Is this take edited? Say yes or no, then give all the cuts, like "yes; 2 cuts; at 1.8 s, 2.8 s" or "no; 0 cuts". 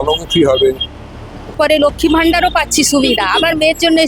yes; 1 cut; at 1.5 s